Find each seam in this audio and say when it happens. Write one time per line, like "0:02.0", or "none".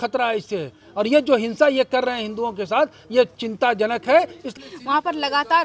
0:04.5